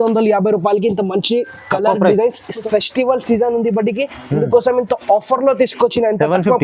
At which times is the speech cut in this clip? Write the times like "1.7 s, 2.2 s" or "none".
2.7 s